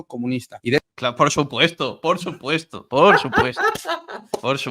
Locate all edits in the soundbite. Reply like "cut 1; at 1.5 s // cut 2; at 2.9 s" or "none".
cut 1; at 0.9 s